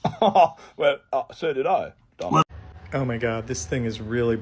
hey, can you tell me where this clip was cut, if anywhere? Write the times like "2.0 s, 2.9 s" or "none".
2.4 s